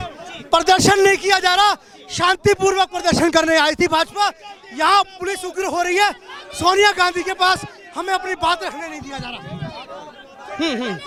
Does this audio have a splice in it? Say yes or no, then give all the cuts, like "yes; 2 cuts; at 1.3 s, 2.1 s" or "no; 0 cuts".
no; 0 cuts